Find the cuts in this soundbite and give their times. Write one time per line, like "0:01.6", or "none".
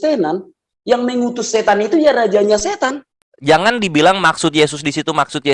0:03.3